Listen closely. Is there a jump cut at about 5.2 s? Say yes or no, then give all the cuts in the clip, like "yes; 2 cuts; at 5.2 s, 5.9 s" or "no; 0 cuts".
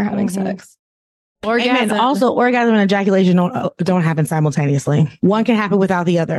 yes; 1 cut; at 5.2 s